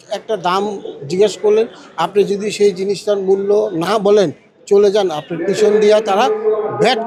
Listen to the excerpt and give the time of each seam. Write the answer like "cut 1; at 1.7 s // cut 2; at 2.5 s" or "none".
none